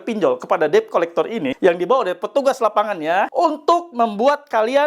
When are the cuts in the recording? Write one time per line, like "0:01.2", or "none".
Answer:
0:01.5
0:03.3

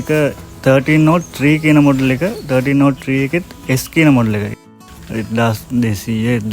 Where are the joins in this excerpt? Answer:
0:04.5

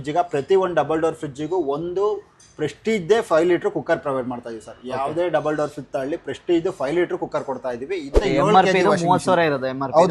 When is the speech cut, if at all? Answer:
0:08.1

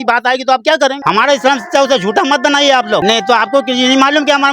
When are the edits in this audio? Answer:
0:01.0
0:03.0

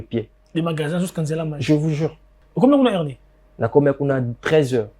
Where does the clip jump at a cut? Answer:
0:02.4

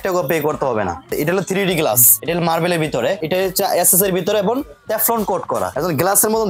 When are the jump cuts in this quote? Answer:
0:01.1
0:02.1
0:03.2
0:05.7

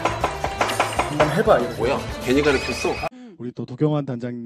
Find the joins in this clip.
0:03.1

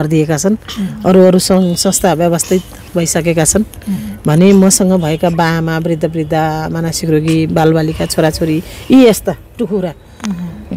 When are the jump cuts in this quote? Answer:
none

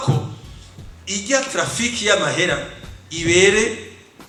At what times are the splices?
none

